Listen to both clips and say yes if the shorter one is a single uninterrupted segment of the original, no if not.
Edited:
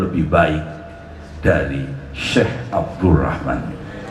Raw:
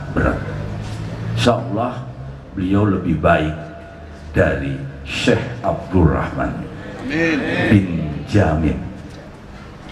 yes